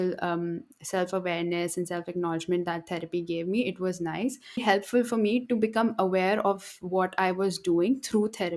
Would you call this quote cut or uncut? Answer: cut